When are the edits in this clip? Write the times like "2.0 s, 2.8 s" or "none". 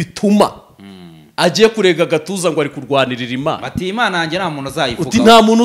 none